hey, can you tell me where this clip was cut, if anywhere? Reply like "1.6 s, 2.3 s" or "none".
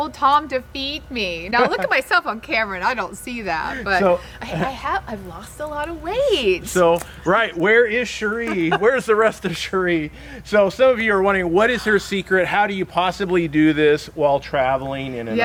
none